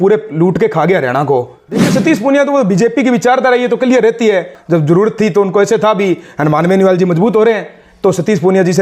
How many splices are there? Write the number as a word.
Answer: two